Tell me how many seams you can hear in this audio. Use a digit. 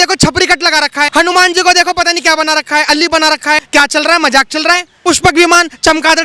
3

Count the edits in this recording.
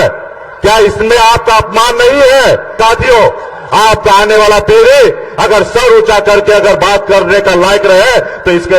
1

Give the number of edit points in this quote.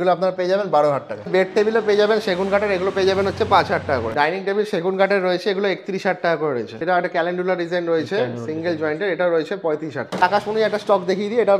4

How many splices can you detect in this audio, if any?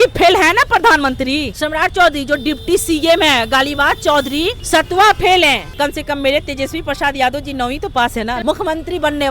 4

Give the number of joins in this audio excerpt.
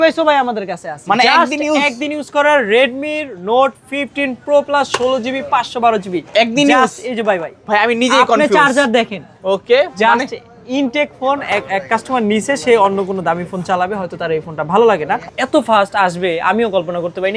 1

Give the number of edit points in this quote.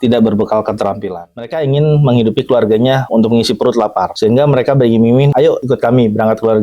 4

